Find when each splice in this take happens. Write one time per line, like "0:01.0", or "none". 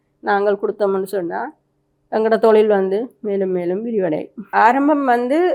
0:04.4